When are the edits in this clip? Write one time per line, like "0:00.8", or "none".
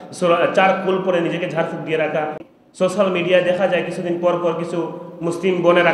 0:02.5